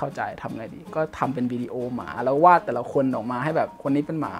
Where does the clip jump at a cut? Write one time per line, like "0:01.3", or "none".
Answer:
none